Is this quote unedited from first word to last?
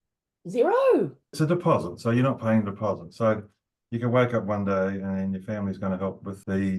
no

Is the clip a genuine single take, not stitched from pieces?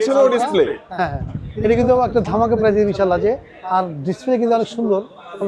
yes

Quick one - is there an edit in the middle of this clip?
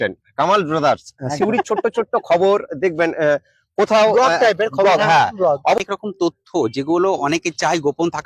yes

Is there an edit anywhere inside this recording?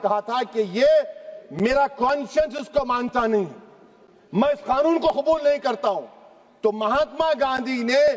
no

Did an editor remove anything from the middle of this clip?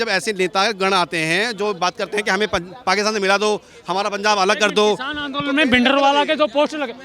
no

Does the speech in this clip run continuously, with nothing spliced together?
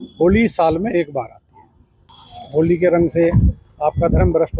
no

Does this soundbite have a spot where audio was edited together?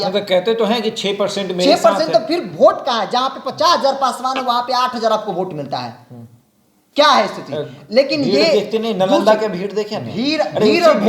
no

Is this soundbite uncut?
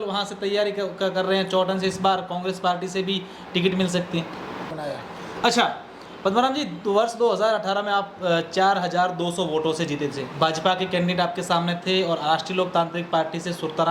no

